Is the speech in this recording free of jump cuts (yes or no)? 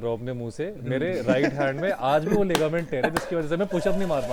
yes